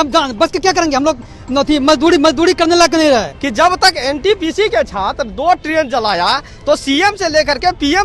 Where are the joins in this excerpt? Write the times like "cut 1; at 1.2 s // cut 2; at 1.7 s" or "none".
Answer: cut 1; at 3.3 s